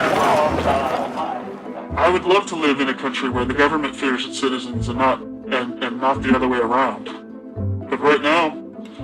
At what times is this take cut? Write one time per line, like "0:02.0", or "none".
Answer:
0:02.5